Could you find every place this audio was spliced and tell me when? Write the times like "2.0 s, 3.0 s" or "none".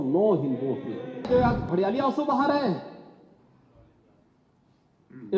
1.3 s